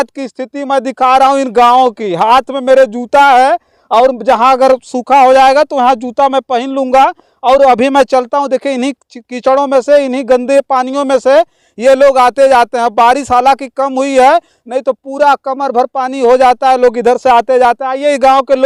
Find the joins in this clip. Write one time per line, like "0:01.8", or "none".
none